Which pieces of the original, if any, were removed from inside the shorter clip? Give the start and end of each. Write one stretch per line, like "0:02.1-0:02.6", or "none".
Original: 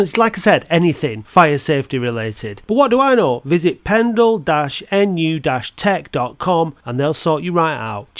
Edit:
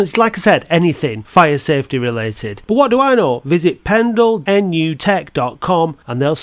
0:04.7-0:05.5